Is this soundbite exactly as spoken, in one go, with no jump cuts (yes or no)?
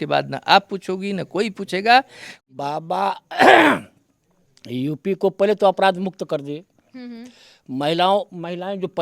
no